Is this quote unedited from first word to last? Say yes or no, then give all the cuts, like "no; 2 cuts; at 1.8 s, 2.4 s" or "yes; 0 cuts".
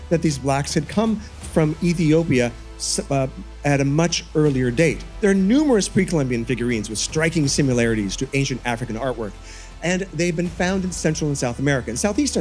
yes; 0 cuts